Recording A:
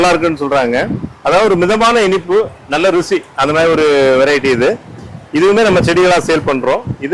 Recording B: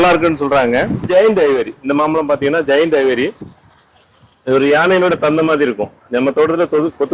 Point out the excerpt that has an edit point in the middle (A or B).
B